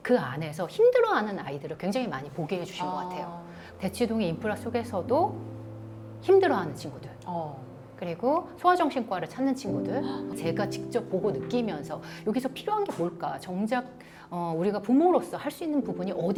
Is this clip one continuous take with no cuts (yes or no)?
yes